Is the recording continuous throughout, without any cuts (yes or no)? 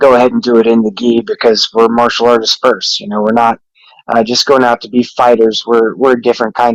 yes